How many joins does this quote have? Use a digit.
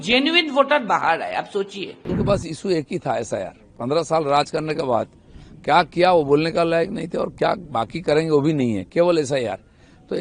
1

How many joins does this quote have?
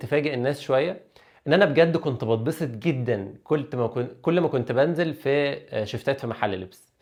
0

